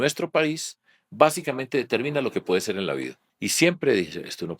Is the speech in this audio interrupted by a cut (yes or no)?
yes